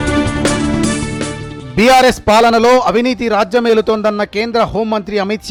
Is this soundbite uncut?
yes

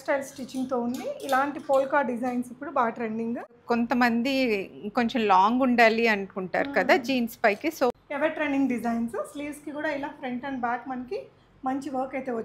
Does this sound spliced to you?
yes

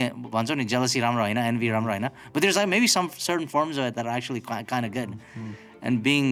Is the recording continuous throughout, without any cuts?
yes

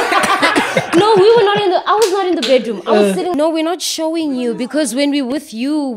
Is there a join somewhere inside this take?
yes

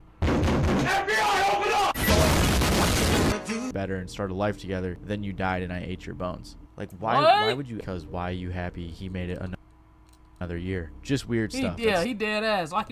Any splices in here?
yes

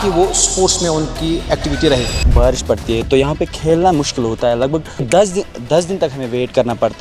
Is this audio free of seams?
no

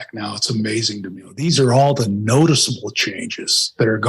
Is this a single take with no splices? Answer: no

